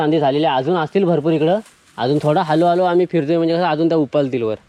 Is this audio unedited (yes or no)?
yes